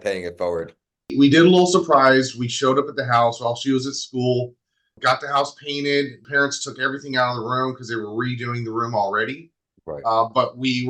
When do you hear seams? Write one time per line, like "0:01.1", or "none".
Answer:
0:01.1